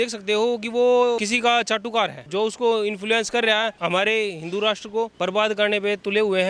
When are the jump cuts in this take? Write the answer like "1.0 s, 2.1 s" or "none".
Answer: 1.2 s, 2.2 s, 3.8 s, 5.1 s